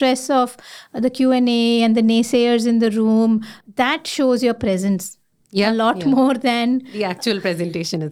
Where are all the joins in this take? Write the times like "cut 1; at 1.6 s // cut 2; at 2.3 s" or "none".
cut 1; at 3.6 s